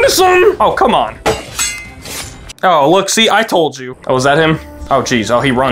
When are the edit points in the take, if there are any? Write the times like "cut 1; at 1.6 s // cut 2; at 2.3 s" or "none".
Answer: cut 1; at 3.8 s // cut 2; at 4.7 s